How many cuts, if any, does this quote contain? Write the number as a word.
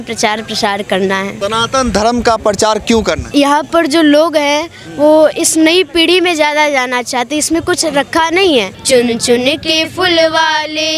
three